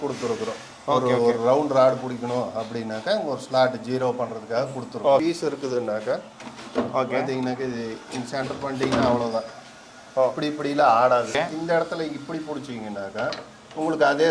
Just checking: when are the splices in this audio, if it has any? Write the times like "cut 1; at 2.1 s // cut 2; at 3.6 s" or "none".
cut 1; at 5.2 s // cut 2; at 11.3 s